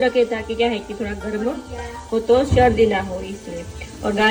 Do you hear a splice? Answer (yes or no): no